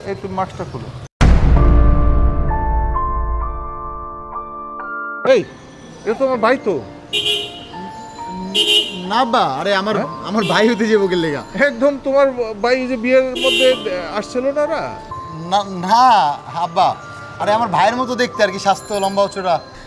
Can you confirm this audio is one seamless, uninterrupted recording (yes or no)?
no